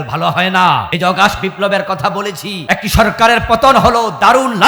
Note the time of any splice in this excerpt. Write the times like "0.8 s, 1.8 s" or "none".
0.9 s, 2.5 s